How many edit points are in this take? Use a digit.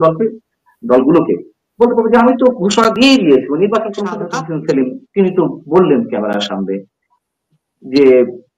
1